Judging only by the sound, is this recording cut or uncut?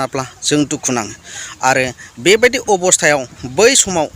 uncut